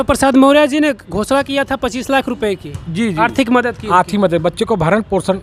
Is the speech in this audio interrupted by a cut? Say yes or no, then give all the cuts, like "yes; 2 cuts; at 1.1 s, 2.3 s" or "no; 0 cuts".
no; 0 cuts